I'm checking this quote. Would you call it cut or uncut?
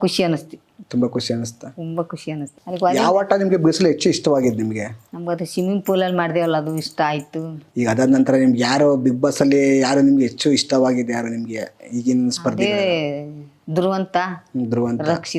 cut